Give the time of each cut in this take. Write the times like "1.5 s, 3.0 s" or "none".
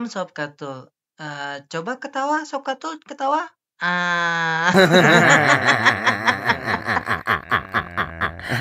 none